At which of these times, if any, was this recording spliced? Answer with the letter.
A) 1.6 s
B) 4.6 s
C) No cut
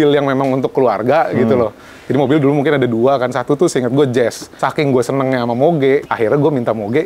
B